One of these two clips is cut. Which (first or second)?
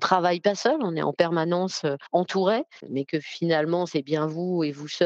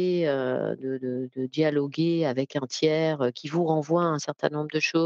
first